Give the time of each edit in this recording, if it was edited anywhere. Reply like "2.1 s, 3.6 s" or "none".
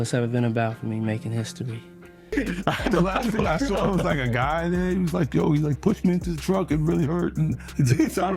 2.3 s